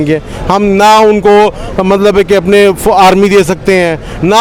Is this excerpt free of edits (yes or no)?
yes